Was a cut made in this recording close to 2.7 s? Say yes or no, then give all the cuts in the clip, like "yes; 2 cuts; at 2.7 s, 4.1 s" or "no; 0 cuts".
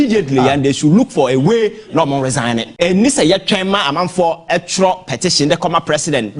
yes; 1 cut; at 2.7 s